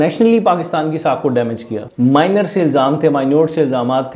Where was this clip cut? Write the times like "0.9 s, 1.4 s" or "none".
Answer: 1.8 s